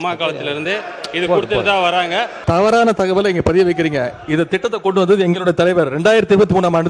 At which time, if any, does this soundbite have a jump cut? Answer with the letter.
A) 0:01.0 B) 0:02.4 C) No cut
B